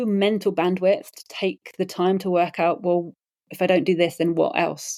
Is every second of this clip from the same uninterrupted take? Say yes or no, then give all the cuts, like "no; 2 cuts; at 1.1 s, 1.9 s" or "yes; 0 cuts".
yes; 0 cuts